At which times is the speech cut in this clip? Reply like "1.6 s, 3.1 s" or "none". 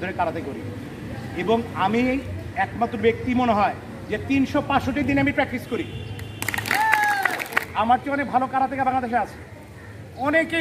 7.7 s